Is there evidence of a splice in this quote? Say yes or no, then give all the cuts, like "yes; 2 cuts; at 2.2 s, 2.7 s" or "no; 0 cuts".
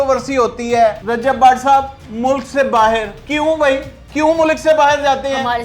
yes; 3 cuts; at 1.0 s, 3.2 s, 4.0 s